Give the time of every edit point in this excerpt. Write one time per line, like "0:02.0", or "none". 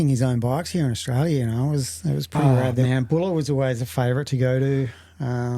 0:02.8